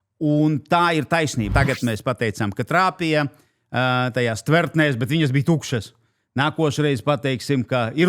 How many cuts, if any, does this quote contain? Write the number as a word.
one